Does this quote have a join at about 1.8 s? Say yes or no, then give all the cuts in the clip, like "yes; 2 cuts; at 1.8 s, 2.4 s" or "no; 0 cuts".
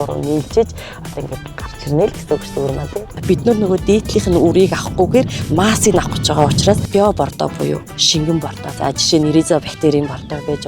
no; 3 cuts; at 3.1 s, 6.8 s, 8.6 s